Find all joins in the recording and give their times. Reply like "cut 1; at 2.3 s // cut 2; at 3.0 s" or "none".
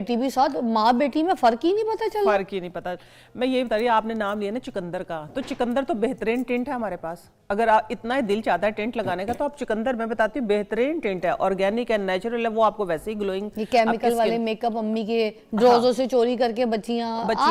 none